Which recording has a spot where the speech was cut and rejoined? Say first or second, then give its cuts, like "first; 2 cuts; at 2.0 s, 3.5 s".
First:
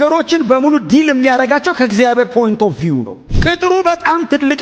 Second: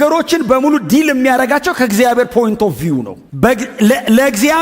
first; 1 cut; at 3.2 s